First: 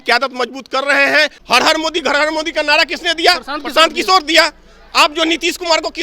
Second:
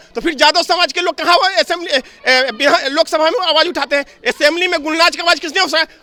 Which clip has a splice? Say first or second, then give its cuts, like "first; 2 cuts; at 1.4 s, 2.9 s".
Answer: first; 1 cut; at 1.4 s